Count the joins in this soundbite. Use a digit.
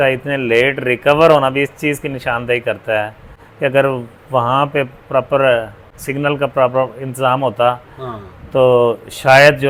0